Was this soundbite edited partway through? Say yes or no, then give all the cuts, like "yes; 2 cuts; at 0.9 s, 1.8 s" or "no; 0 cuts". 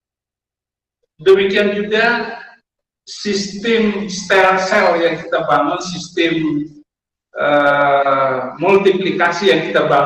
no; 0 cuts